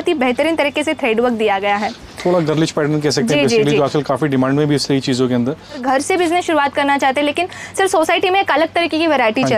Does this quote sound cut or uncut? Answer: cut